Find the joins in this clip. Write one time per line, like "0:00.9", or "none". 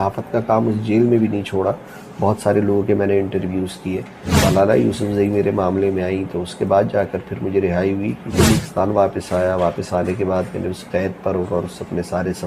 0:04.2
0:08.6